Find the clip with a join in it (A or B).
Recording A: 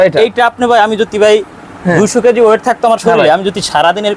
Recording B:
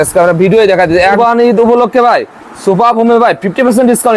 B